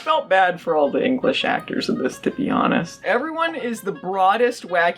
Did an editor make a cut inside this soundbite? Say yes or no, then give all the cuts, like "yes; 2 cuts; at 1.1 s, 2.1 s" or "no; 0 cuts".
yes; 1 cut; at 2.9 s